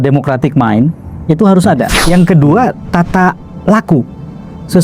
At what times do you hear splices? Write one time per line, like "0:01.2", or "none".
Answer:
0:02.0

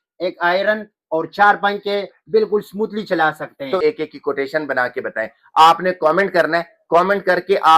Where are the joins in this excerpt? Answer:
0:03.8

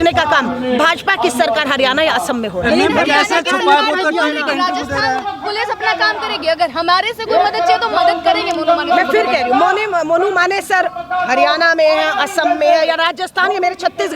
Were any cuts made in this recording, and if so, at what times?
none

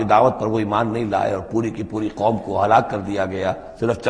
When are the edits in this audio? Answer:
none

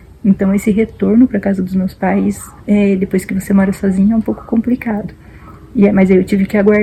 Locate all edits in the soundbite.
none

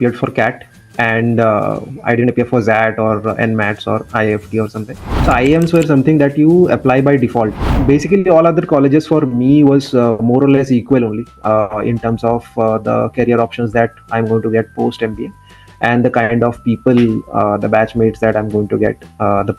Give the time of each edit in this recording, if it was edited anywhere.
0:05.2
0:07.7

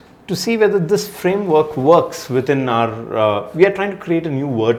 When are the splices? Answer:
none

